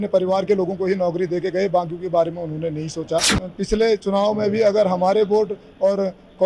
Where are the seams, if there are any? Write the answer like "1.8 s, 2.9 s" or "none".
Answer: 3.4 s